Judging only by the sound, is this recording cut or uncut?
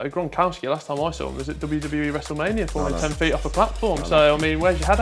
uncut